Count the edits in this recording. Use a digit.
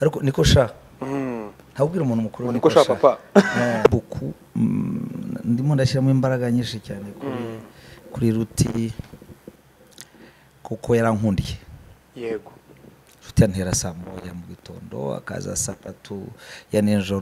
1